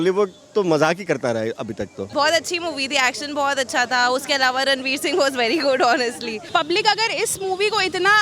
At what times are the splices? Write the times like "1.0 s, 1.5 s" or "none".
2.1 s, 6.3 s